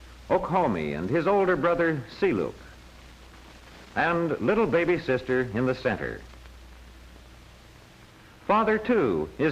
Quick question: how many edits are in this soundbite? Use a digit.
1